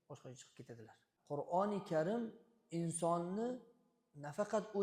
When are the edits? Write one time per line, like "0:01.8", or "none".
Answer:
0:01.1